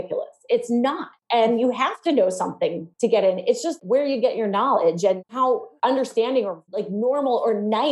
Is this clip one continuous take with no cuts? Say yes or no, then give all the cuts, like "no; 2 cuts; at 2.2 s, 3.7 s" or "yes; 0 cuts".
no; 5 cuts; at 1.1 s, 2.9 s, 3.8 s, 5.3 s, 6.7 s